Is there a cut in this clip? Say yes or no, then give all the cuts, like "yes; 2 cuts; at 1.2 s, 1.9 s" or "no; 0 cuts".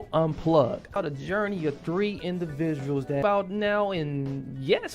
yes; 2 cuts; at 1.0 s, 3.2 s